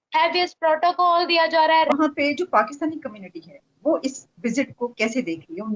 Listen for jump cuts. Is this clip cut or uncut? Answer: cut